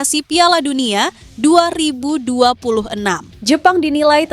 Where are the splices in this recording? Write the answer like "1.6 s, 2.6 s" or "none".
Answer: 3.3 s